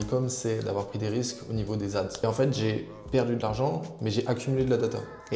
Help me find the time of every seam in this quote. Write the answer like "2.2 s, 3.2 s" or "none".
2.1 s